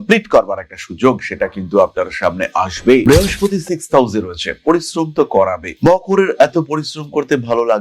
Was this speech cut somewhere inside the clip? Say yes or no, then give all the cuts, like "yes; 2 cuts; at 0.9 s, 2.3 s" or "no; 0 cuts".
yes; 1 cut; at 3.0 s